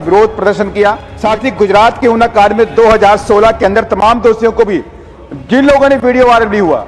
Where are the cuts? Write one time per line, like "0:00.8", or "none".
0:01.1